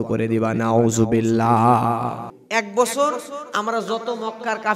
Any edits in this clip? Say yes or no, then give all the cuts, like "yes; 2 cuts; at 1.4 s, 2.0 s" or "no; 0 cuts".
yes; 1 cut; at 2.4 s